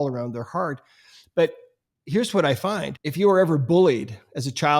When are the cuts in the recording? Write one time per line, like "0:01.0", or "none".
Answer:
0:03.0